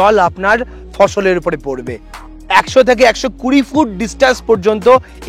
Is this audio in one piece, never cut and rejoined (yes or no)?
no